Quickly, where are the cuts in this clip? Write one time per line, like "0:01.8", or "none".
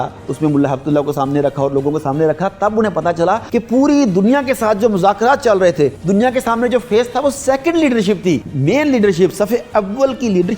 0:03.4
0:06.0
0:08.5